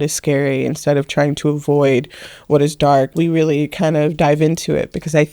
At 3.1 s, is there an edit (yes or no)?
yes